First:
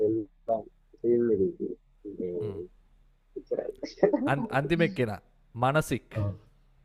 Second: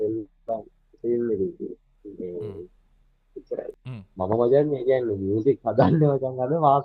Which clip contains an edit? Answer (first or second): second